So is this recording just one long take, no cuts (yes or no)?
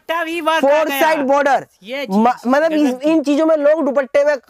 yes